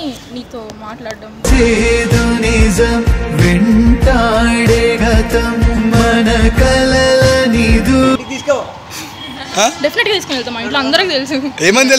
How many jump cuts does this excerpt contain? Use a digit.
1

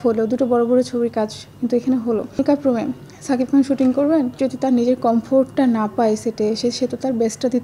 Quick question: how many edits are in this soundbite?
2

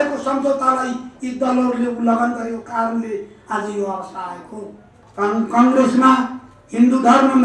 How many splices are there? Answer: 1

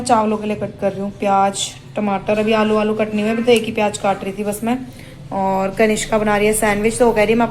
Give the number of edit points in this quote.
0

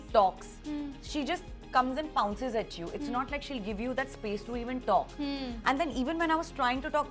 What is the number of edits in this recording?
0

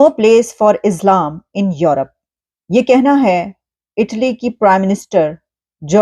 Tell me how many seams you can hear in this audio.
0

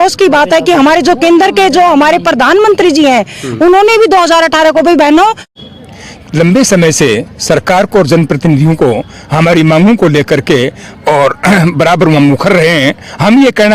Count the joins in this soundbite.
1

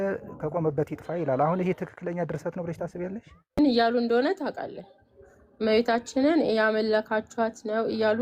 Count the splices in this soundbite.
1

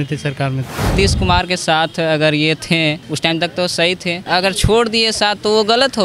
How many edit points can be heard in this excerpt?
2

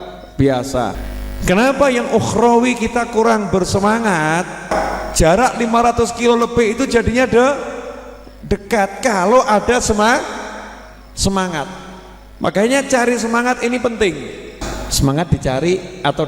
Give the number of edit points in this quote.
3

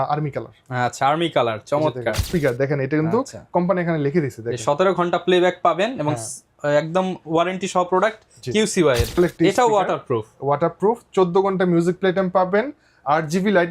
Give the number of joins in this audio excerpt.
2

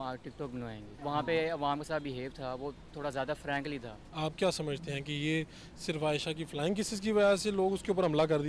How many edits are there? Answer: 2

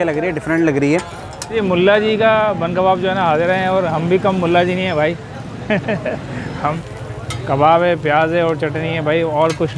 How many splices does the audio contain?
2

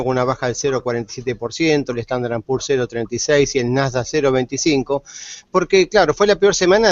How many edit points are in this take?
1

